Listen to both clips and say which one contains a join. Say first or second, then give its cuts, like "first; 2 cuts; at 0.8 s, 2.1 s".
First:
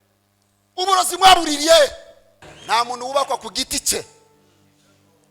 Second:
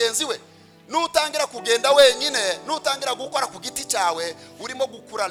first; 1 cut; at 2.5 s